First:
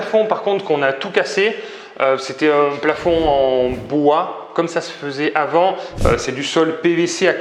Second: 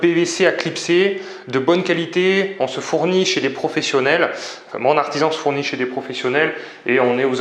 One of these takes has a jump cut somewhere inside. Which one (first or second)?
first